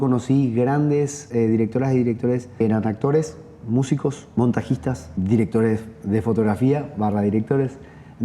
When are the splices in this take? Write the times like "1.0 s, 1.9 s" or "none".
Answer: 1.3 s